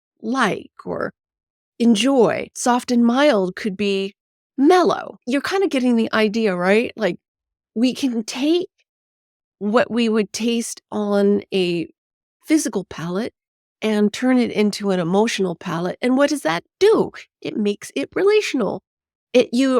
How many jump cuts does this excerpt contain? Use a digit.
1